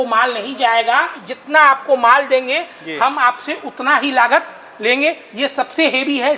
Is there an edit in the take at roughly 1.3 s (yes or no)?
yes